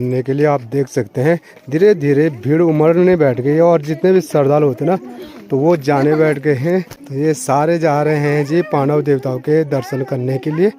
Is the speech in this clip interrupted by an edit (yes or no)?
no